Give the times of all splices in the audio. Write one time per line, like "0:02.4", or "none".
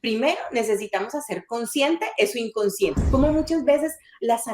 0:03.0